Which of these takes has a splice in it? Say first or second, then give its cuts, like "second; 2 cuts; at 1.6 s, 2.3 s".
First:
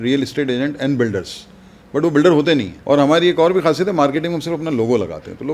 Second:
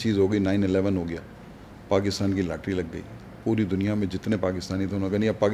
first; 1 cut; at 2.7 s